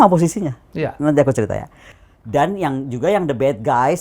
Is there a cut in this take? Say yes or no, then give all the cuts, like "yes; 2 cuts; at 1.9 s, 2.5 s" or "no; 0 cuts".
yes; 1 cut; at 1.9 s